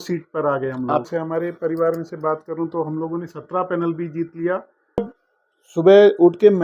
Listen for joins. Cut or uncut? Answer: cut